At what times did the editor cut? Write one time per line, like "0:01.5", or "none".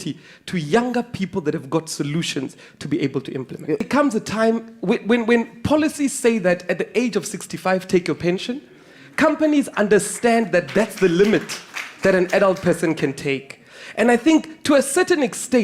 0:03.9